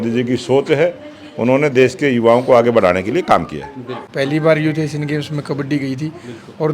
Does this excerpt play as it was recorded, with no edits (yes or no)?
no